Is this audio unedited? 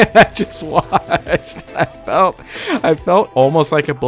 yes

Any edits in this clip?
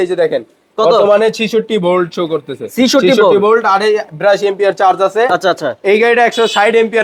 no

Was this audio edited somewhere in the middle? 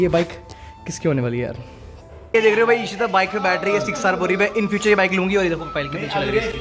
no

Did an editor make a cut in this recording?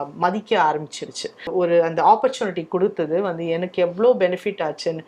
yes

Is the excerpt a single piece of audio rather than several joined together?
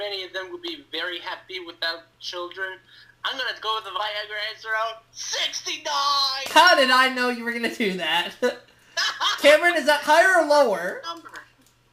no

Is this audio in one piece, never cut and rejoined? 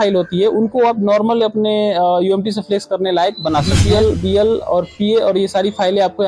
no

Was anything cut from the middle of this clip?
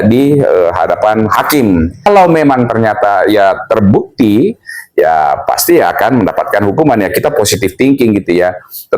yes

